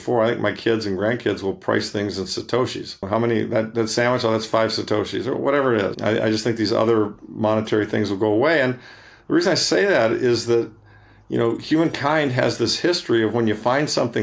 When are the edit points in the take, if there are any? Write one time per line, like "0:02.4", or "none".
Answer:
0:03.0
0:06.0